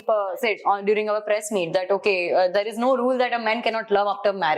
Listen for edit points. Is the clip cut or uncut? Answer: uncut